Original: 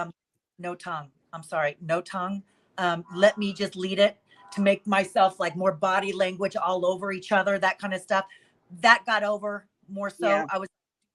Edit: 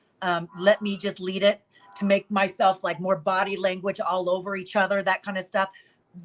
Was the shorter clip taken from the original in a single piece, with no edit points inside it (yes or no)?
yes